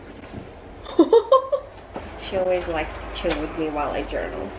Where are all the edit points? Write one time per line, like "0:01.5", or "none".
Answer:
none